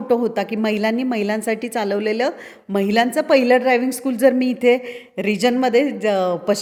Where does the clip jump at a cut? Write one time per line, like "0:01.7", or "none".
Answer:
none